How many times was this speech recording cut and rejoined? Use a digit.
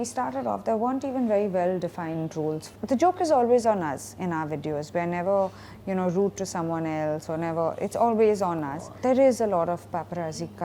2